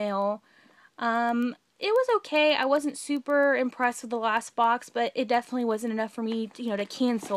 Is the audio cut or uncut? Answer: uncut